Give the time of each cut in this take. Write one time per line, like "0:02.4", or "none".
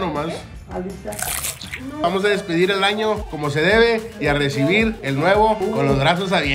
0:02.0
0:03.3
0:05.0
0:05.6